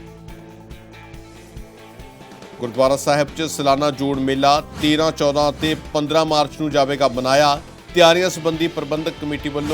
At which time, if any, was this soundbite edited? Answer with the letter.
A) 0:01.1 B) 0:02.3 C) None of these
B